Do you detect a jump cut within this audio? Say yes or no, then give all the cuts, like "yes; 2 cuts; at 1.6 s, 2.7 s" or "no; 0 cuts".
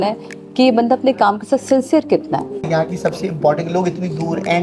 yes; 1 cut; at 2.6 s